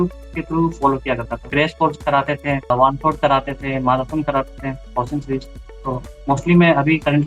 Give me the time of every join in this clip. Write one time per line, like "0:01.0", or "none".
0:01.5
0:02.7